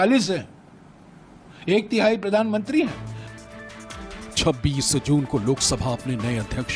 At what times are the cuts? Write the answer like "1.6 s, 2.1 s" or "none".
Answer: none

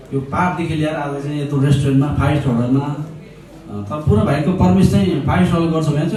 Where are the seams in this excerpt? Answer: none

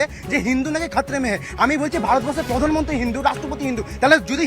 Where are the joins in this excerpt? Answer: none

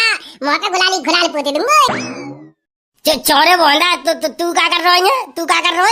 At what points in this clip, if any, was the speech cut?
1.9 s

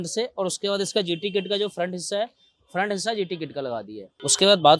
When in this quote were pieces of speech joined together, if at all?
3.8 s

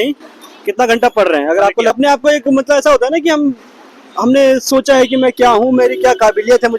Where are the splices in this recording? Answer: 2.0 s

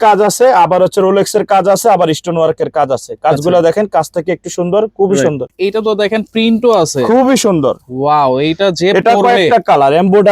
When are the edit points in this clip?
5.5 s

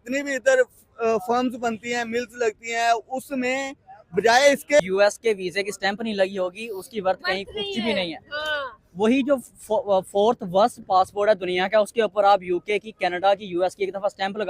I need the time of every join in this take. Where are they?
4.8 s

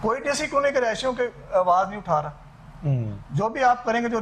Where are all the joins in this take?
none

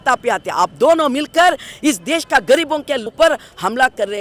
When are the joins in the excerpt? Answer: 3.1 s

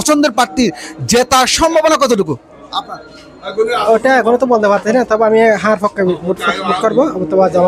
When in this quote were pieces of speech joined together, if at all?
none

